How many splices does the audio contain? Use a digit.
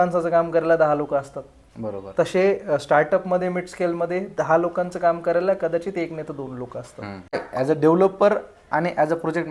1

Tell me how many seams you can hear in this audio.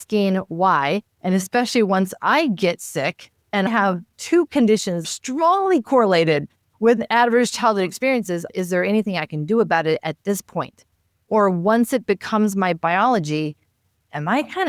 3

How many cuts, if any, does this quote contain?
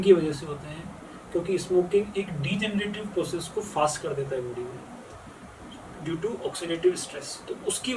0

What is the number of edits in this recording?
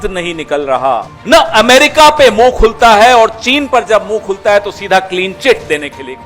1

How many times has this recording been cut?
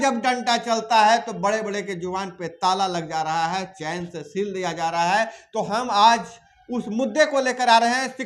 0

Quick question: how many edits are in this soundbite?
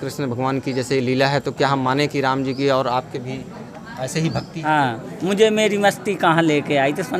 1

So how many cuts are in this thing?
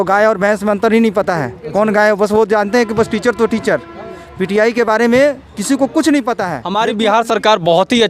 1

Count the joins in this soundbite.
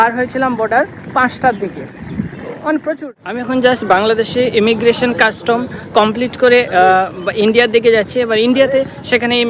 1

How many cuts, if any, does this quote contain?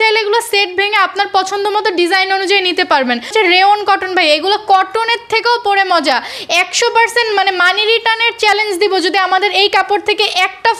1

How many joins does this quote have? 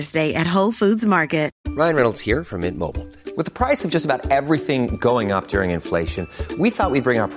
1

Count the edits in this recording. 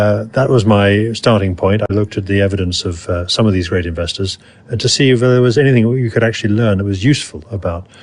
1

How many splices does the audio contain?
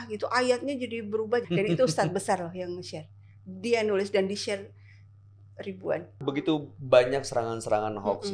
2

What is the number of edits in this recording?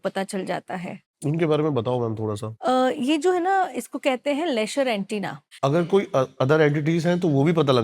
1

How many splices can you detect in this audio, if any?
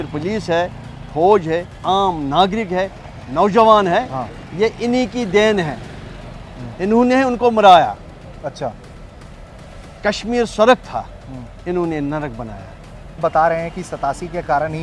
1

